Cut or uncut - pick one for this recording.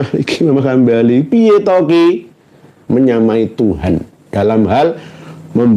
cut